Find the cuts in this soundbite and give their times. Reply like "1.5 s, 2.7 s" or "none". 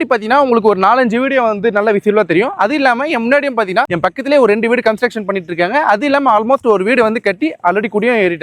none